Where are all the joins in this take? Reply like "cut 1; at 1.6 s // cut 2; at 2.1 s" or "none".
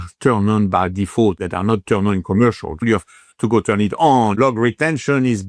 cut 1; at 1.4 s // cut 2; at 2.8 s // cut 3; at 4.4 s